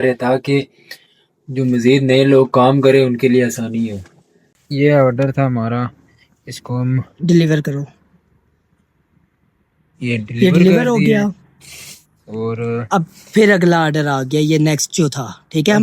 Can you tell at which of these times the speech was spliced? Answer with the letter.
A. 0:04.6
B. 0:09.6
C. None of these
A